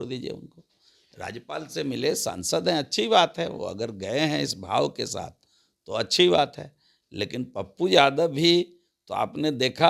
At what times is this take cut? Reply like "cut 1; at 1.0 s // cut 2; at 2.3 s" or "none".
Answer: none